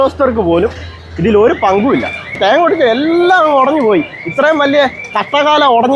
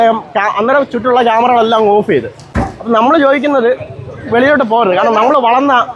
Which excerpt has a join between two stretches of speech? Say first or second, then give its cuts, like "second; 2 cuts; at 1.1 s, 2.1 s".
first; 1 cut; at 2.4 s